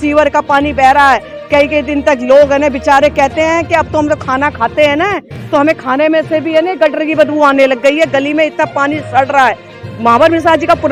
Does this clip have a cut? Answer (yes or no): no